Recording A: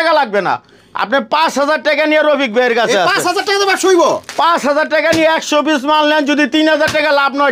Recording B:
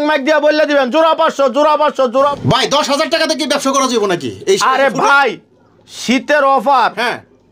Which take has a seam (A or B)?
B